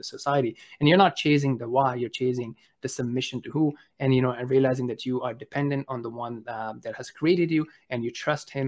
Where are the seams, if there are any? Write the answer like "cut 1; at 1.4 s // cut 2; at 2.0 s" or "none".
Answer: none

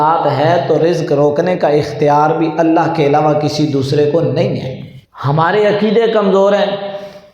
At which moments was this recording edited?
none

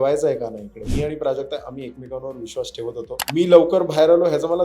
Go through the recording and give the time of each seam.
cut 1; at 0.8 s // cut 2; at 3.2 s

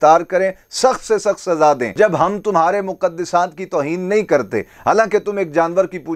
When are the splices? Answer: cut 1; at 1.9 s

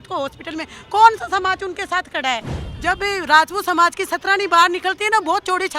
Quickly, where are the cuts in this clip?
cut 1; at 2.6 s

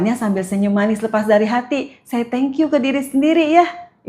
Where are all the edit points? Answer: cut 1; at 1.0 s

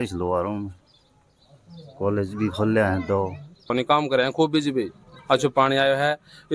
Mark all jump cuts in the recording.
cut 1; at 3.7 s

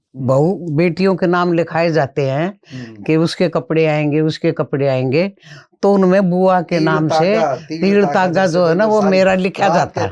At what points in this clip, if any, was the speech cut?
none

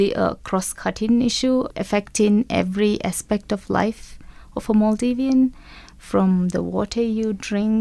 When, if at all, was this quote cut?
cut 1; at 1.8 s

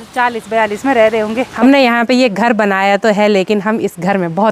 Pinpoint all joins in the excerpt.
cut 1; at 1.6 s

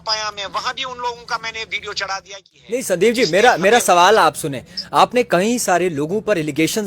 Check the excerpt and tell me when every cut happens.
cut 1; at 2.6 s

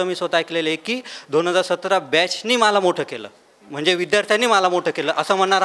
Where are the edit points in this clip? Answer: none

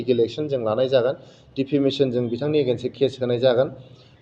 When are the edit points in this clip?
none

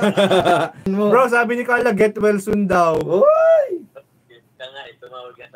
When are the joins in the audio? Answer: cut 1; at 0.9 s

